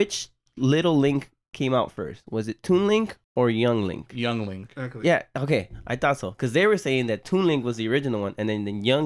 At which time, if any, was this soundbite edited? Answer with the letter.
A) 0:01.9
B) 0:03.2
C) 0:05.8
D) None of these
B